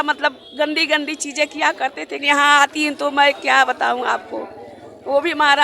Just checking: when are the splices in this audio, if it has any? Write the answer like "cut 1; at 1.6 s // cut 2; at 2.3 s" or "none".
cut 1; at 2.2 s